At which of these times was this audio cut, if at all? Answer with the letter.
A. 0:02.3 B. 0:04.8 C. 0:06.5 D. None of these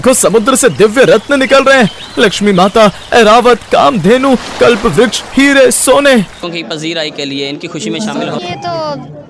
C